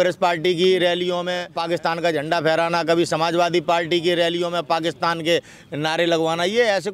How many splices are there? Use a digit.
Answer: 1